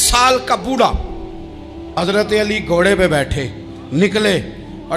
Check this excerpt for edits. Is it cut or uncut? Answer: cut